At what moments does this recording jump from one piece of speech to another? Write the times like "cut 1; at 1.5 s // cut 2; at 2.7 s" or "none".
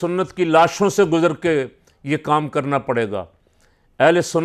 none